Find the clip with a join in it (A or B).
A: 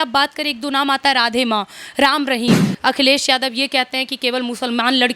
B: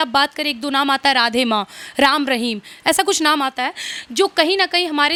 A